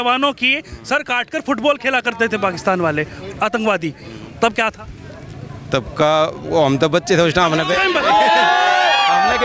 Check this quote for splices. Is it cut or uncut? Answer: uncut